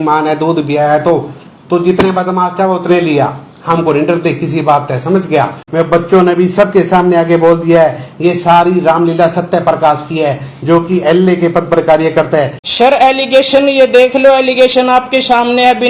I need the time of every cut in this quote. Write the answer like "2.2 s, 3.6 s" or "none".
5.6 s, 12.6 s